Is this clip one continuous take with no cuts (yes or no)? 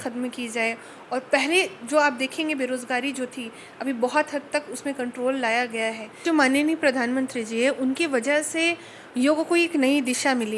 no